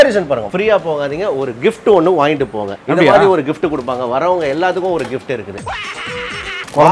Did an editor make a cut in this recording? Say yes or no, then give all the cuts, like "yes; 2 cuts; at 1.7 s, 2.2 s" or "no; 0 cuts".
no; 0 cuts